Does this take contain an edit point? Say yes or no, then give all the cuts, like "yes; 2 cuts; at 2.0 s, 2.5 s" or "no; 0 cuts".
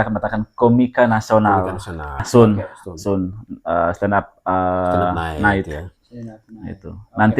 yes; 1 cut; at 2.2 s